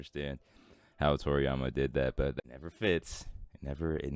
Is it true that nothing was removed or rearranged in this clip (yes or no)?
no